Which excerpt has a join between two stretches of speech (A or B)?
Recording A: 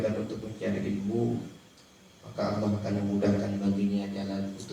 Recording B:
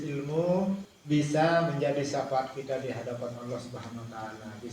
B